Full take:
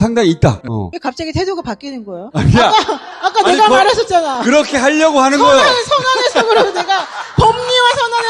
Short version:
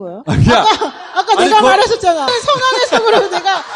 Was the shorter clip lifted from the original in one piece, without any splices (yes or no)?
no